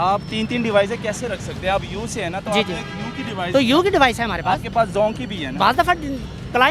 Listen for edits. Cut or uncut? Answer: uncut